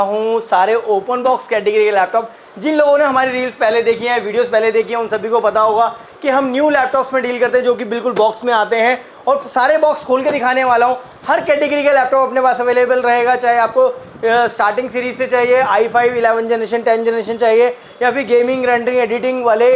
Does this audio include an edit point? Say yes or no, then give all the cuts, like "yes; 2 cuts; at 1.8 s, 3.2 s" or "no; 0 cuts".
no; 0 cuts